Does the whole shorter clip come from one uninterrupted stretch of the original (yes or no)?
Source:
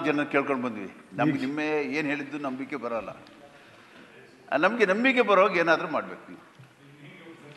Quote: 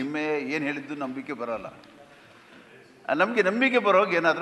yes